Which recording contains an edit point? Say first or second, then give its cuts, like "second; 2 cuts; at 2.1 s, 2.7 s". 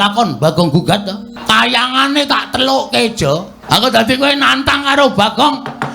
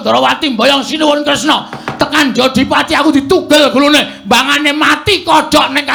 first; 2 cuts; at 1.3 s, 3.5 s